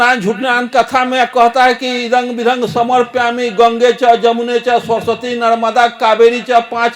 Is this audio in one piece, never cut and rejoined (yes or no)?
yes